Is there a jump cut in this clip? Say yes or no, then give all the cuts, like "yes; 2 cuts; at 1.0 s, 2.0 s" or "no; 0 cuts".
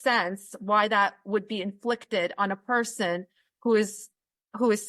no; 0 cuts